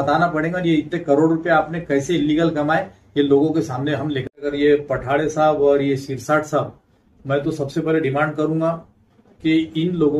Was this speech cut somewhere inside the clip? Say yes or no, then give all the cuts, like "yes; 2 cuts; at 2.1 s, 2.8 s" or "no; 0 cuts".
yes; 1 cut; at 4.5 s